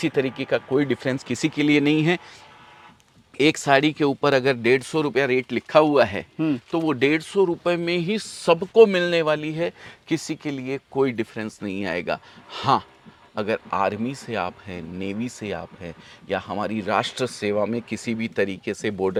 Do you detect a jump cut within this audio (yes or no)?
no